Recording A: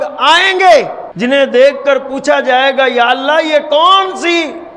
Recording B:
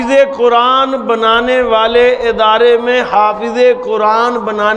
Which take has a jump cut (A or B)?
A